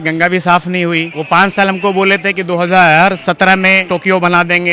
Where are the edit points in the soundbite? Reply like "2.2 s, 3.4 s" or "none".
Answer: 1.1 s, 3.8 s